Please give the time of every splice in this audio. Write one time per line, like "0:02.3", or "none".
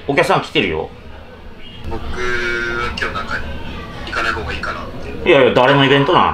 0:01.8

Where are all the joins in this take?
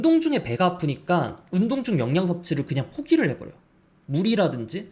none

